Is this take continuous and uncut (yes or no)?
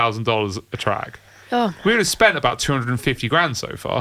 yes